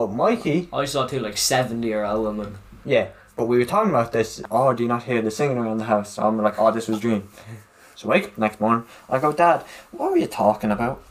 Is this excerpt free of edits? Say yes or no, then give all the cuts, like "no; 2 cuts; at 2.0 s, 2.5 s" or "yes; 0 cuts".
no; 1 cut; at 4.4 s